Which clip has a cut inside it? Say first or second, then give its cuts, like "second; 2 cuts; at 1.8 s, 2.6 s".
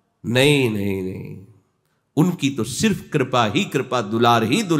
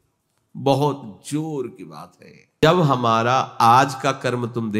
second; 1 cut; at 2.5 s